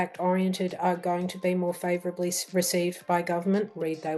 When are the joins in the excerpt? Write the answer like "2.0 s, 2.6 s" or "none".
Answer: none

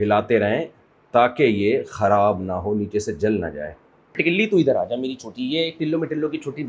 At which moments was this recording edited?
4.2 s

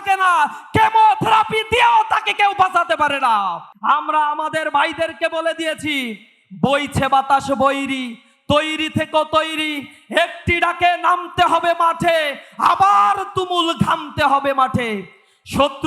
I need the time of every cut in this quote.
3.7 s

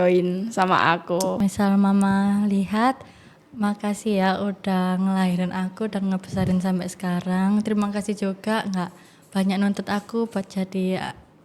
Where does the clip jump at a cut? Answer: 1.4 s

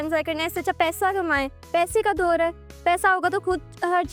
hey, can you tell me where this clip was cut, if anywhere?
none

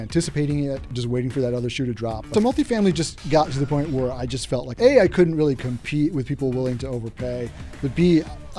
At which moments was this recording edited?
0.9 s, 2.3 s, 4.7 s

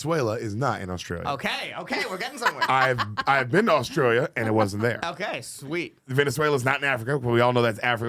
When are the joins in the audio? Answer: 6.0 s

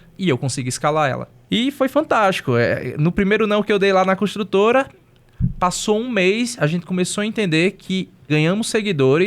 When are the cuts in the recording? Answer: 1.3 s, 8.1 s

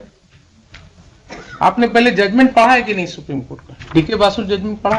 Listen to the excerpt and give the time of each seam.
none

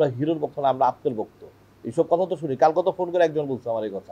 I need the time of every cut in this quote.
none

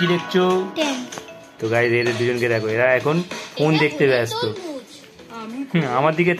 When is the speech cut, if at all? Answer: none

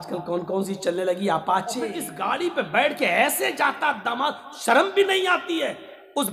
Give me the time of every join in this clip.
2.1 s

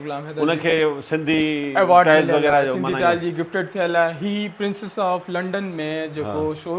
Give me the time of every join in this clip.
none

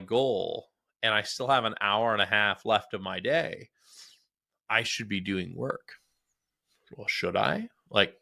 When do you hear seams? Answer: none

